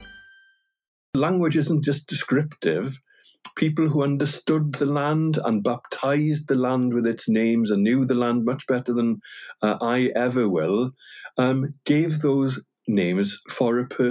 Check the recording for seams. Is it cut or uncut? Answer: cut